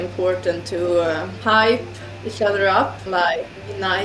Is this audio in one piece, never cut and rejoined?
no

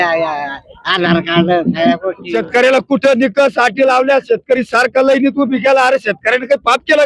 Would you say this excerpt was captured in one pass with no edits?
no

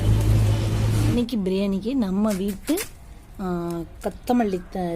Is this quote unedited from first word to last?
no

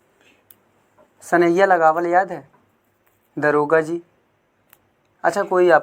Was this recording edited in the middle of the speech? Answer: no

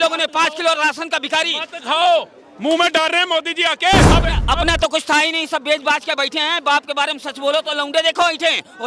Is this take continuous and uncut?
no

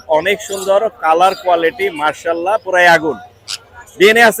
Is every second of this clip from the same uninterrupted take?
yes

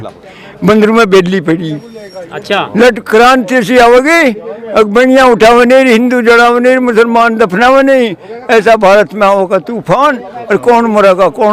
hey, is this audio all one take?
yes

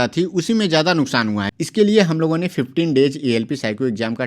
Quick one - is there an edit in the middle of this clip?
yes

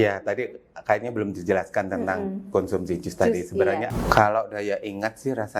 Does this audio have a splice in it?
yes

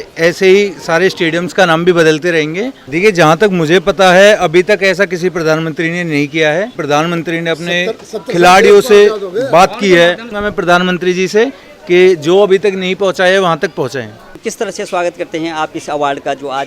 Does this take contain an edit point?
yes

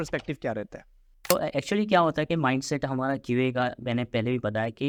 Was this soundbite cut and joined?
no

